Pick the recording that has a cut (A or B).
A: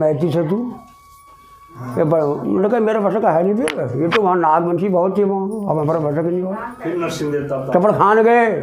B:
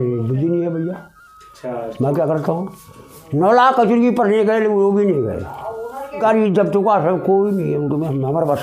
B